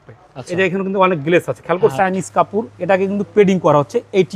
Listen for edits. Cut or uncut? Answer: cut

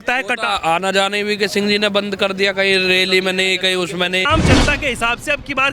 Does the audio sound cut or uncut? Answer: cut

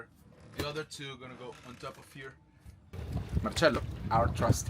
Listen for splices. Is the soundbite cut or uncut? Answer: cut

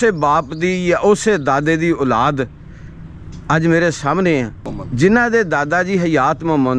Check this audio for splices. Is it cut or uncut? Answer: uncut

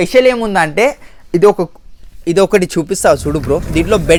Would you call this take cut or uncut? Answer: uncut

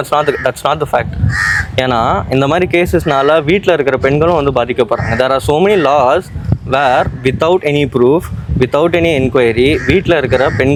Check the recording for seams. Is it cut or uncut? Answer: uncut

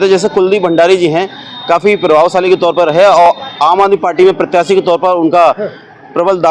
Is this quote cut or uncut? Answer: uncut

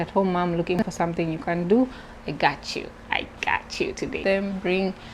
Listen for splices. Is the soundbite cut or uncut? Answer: cut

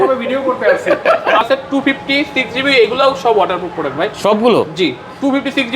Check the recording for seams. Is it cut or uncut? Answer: cut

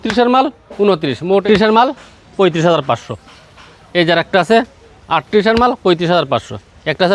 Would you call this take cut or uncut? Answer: cut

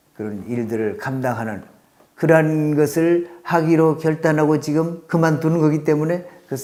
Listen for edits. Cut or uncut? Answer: uncut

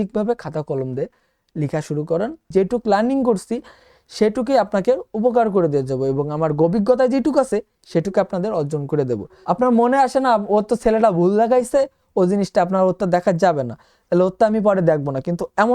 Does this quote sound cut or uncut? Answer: cut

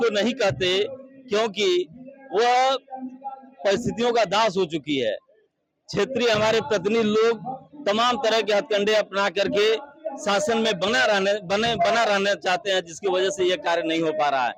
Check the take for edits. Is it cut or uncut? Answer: uncut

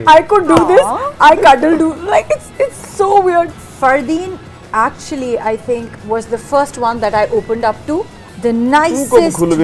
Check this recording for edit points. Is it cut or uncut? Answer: cut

